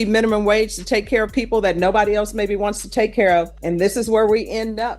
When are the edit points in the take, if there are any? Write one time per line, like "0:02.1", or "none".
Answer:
0:03.6